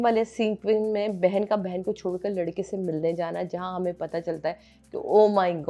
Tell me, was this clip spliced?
no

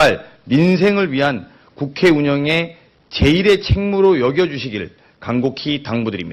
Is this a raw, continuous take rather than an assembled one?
no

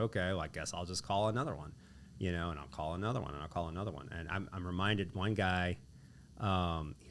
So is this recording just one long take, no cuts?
yes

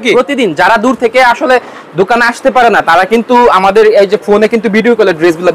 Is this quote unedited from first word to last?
yes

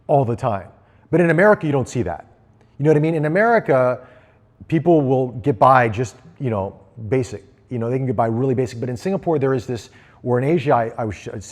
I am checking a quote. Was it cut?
no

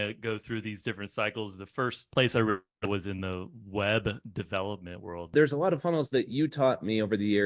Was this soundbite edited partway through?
yes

